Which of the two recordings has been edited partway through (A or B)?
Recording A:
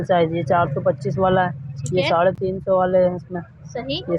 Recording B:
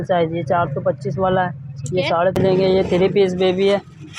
B